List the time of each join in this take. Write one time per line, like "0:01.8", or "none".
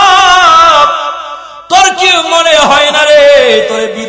none